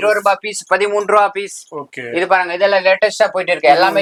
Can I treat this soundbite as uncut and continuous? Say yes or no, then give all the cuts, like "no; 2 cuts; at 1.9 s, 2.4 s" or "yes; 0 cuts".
yes; 0 cuts